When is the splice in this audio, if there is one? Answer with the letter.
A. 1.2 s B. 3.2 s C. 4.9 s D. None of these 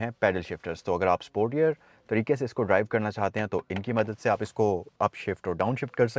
C